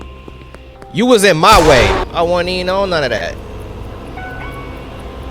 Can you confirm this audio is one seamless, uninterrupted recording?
no; 1 cut; at 2.1 s

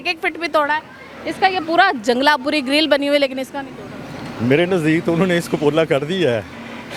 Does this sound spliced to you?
no; 0 cuts

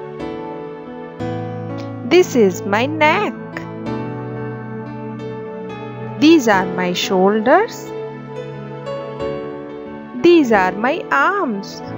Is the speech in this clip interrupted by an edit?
no; 0 cuts

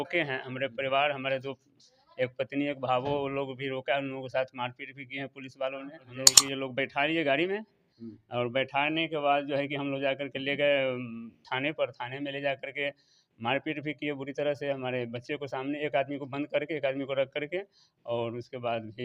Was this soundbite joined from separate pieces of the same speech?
yes; 1 cut; at 6.4 s

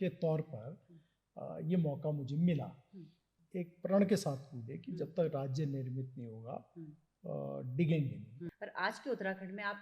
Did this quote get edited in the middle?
yes; 2 cuts; at 3.4 s, 8.4 s

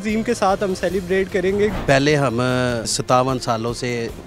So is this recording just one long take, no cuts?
no; 2 cuts; at 1.8 s, 3.0 s

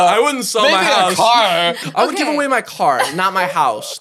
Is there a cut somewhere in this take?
yes; 1 cut; at 1.9 s

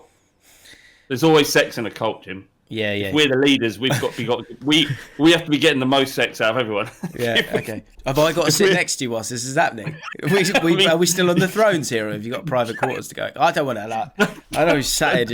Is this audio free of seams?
yes; 0 cuts

